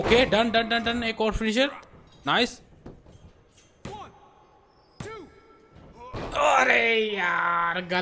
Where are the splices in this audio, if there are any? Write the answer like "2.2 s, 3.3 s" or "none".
none

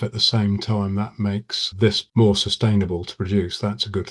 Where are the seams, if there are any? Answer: none

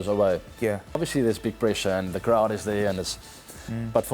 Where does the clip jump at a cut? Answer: 1.0 s

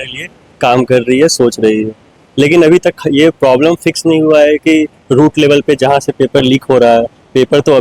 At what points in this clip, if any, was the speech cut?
none

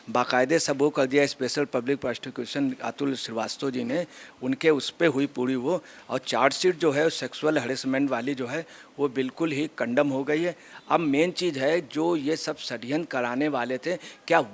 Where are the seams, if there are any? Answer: 10.7 s

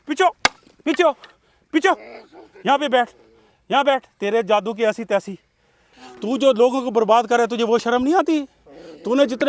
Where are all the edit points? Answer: 6.0 s

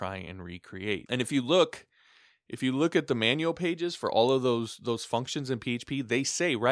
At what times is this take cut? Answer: 1.0 s

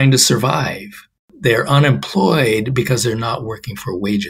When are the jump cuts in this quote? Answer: 1.3 s

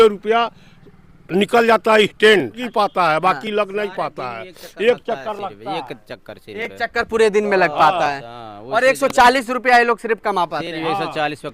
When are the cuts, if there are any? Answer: 2.6 s

